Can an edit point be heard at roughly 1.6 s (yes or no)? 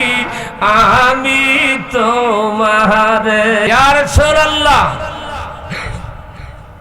no